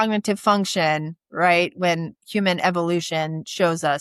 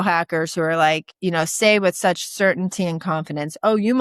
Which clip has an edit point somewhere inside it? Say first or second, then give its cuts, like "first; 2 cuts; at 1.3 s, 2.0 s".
second; 1 cut; at 1.1 s